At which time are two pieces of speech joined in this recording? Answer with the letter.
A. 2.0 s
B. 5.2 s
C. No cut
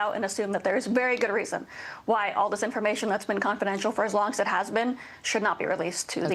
C